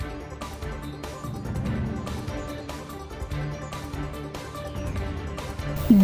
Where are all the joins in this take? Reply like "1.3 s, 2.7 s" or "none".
2.0 s